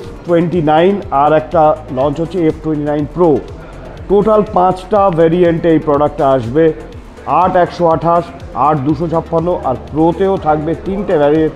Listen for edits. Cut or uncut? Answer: uncut